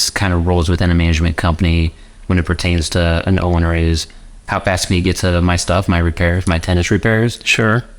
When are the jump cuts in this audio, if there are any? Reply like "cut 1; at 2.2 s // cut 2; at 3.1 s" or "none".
none